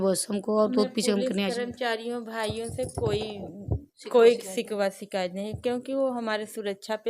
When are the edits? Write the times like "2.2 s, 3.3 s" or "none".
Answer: none